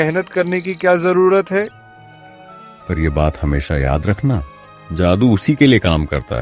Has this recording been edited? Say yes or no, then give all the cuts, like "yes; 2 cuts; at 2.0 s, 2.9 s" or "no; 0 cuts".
no; 0 cuts